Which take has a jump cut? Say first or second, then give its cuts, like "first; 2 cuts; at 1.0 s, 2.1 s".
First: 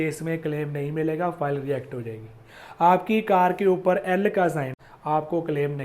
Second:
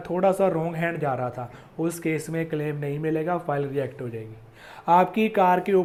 first; 1 cut; at 4.8 s